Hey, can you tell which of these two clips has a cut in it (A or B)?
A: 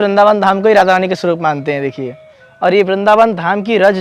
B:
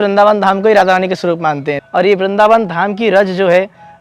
B